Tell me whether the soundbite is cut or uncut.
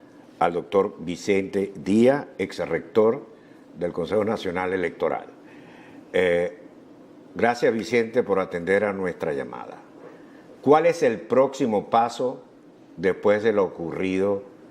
uncut